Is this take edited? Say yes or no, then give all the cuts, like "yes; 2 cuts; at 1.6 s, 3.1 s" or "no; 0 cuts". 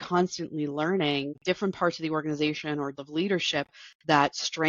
yes; 2 cuts; at 1.4 s, 3.0 s